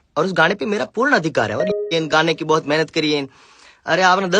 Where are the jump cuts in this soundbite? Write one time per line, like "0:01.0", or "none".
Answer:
0:01.8